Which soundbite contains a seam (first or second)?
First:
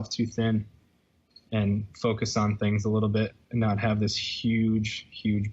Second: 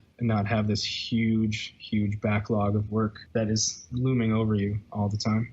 second